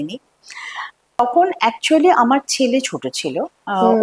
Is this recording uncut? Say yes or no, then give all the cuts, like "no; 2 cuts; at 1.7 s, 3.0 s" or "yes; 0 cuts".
no; 1 cut; at 1.2 s